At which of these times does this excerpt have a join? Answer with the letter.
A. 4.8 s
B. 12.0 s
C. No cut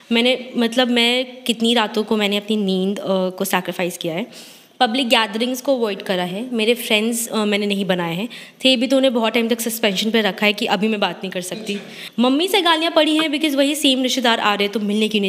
B